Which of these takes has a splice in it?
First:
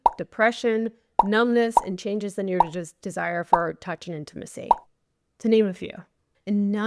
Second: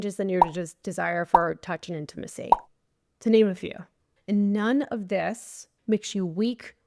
second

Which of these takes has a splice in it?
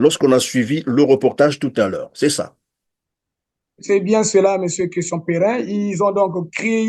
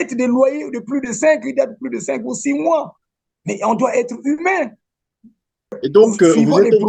second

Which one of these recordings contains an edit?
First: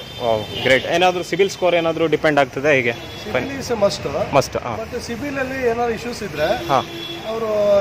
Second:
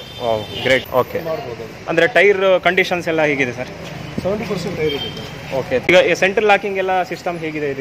second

